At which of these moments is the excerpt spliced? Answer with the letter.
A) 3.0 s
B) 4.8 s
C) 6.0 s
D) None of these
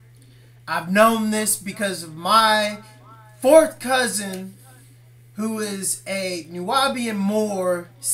C